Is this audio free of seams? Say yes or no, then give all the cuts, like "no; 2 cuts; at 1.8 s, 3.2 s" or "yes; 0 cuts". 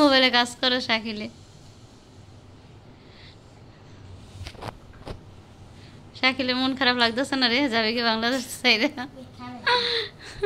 yes; 0 cuts